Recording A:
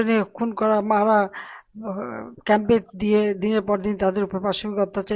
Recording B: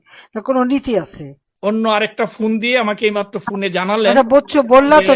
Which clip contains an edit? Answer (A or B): B